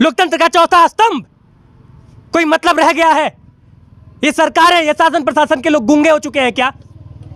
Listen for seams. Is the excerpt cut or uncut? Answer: uncut